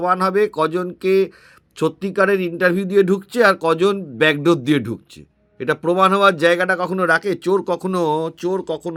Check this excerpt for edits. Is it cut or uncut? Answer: uncut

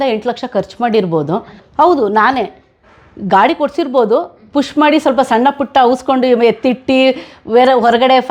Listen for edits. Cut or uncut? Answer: cut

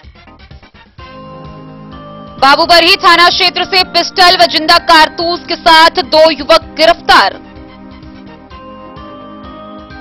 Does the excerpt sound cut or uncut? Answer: cut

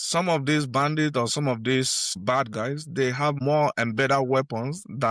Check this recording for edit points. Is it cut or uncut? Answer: cut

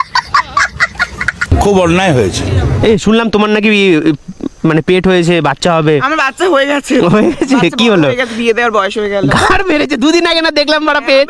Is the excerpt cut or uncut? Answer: cut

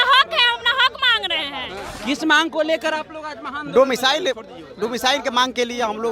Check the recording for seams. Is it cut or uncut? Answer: cut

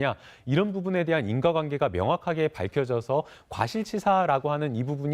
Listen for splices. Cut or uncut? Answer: cut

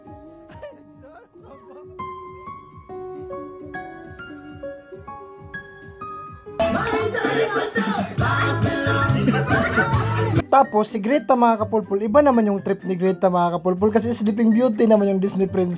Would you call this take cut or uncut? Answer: cut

